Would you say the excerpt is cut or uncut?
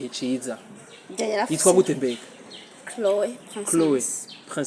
uncut